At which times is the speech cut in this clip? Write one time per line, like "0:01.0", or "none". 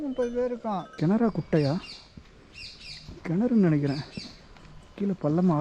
0:00.9